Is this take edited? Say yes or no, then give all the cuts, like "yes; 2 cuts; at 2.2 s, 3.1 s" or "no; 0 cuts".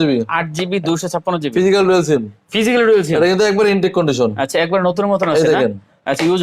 no; 0 cuts